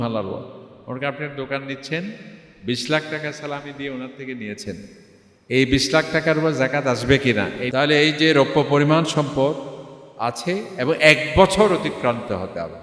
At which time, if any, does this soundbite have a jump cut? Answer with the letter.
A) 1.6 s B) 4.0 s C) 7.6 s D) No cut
C